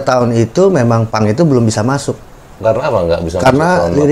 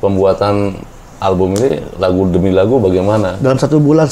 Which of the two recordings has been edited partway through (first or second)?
first